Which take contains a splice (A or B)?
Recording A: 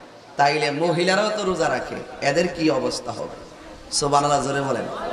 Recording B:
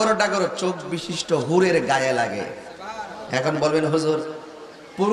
B